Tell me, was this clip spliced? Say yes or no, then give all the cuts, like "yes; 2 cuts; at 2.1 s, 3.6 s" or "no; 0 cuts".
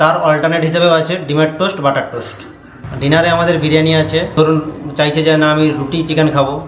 yes; 2 cuts; at 2.6 s, 4.4 s